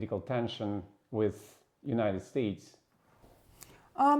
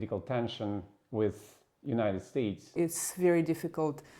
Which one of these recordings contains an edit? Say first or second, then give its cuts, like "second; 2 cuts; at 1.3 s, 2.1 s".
second; 1 cut; at 2.8 s